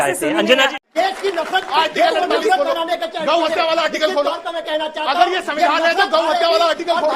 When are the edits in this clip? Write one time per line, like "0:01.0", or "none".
0:00.9

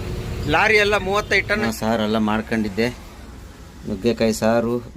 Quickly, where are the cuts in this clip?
0:01.6

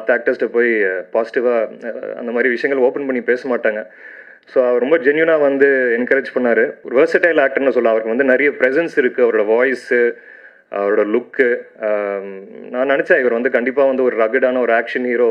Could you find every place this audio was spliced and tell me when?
0:06.8

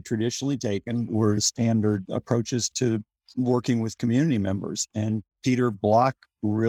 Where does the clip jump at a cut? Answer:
none

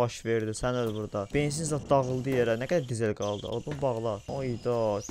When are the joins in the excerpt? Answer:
0:01.3
0:04.2

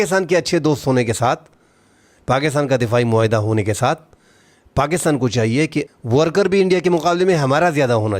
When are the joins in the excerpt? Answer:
0:05.9

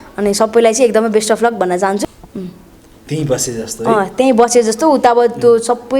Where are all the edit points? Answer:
0:02.0

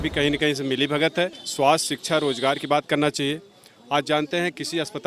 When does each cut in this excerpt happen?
0:01.4

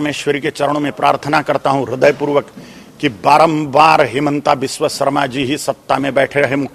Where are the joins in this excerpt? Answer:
none

